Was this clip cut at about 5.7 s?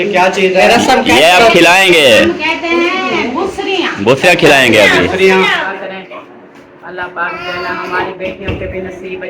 yes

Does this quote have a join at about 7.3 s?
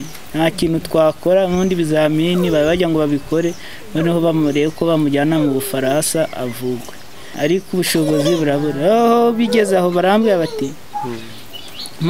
yes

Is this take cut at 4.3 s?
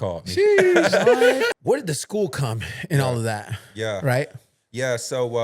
no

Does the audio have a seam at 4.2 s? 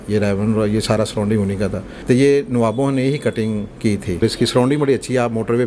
yes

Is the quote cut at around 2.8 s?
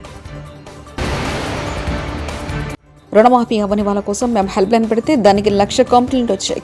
yes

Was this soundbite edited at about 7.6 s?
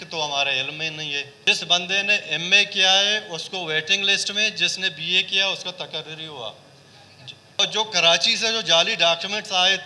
yes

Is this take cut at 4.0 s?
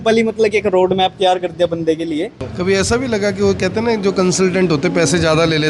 no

